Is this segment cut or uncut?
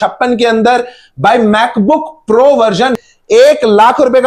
cut